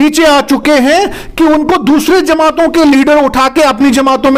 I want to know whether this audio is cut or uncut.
uncut